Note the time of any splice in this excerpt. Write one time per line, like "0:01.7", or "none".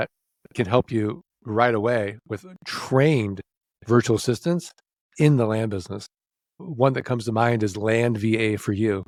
none